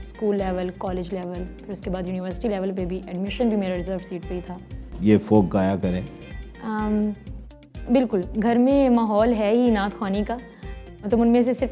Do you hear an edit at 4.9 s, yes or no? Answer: yes